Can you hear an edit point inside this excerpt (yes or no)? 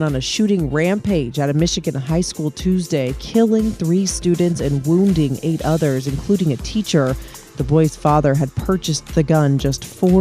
no